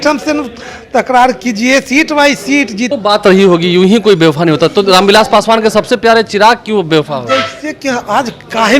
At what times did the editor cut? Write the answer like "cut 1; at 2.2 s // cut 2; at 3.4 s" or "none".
cut 1; at 2.8 s